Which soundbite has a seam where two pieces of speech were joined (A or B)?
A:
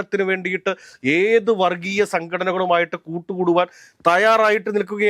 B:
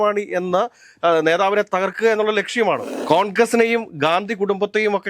B